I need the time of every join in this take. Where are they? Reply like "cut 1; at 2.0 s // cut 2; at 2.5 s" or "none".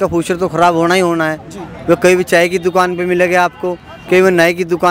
none